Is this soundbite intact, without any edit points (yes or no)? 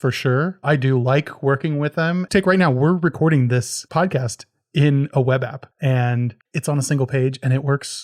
no